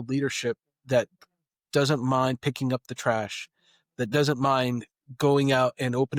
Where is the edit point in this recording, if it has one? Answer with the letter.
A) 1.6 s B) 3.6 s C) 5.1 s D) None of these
D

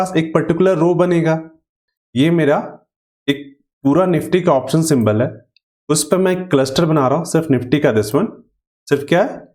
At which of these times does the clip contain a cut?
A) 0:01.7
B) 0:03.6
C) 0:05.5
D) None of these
A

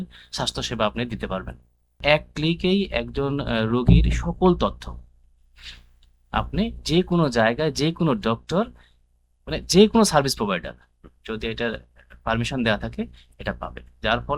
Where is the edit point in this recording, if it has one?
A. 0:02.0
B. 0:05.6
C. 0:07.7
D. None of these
A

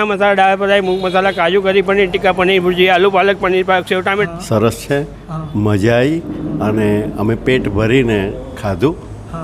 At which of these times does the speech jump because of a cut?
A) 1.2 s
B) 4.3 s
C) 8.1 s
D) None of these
B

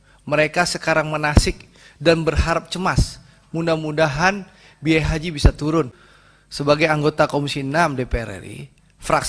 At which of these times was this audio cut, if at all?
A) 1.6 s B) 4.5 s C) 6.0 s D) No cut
C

